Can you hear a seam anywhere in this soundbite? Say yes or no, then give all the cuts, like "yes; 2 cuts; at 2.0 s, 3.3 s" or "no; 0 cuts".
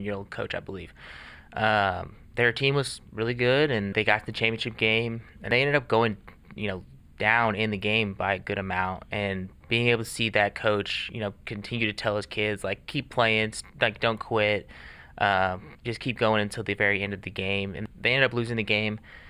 yes; 3 cuts; at 3.9 s, 5.5 s, 17.8 s